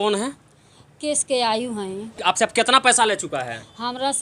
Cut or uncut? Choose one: cut